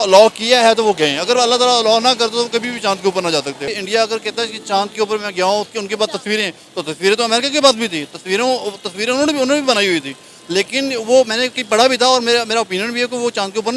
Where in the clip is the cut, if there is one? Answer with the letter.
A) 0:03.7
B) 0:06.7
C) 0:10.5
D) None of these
A